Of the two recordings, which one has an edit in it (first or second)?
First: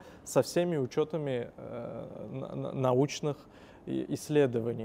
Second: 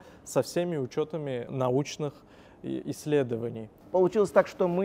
second